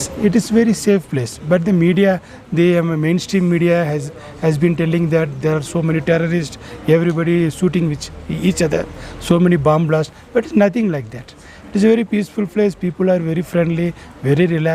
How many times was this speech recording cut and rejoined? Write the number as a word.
zero